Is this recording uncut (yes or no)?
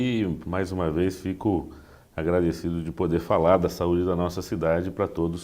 no